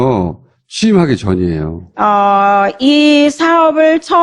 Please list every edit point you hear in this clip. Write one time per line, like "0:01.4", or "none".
none